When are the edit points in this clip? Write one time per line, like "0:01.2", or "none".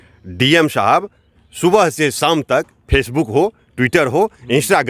none